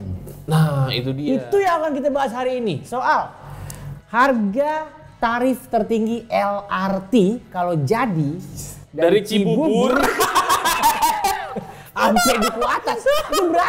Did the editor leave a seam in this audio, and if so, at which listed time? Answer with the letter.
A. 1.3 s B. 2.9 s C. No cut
C